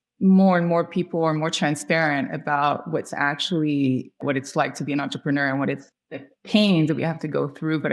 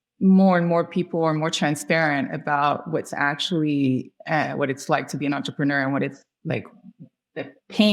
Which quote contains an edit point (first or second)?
first